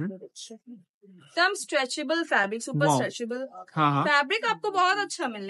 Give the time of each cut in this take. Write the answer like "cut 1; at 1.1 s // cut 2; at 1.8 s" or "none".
none